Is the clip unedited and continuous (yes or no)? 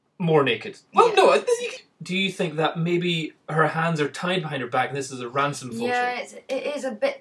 no